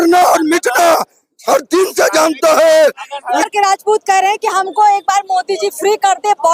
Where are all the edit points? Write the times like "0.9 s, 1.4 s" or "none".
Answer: 3.5 s